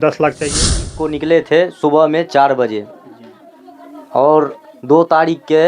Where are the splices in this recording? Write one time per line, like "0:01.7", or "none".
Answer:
0:00.9